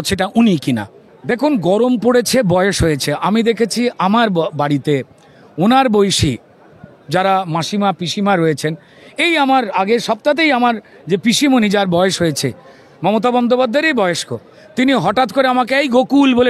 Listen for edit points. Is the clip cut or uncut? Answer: uncut